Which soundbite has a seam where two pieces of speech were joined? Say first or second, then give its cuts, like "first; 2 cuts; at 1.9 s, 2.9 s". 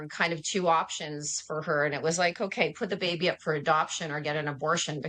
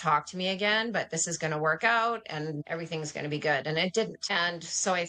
second; 2 cuts; at 2.6 s, 4.2 s